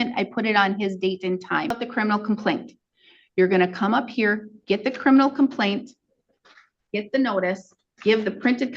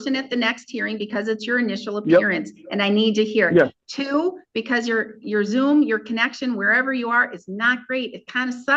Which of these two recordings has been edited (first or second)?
first